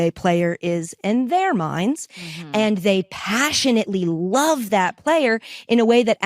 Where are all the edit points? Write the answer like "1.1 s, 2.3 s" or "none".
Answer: 1.8 s